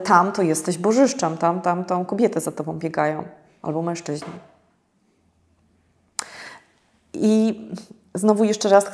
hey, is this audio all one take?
yes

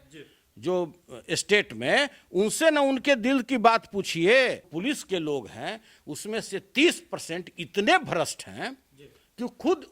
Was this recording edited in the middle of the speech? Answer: yes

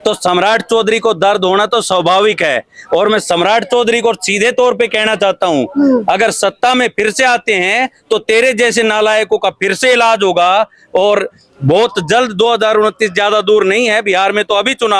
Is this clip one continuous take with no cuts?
yes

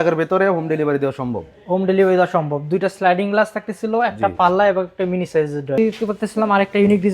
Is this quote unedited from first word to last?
no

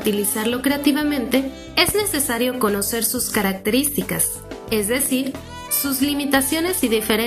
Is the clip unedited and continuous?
yes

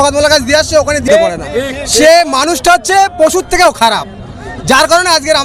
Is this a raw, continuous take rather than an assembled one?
no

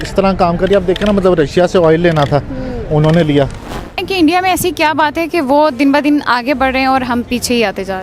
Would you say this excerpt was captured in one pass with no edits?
no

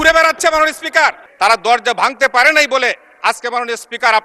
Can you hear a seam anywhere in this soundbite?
yes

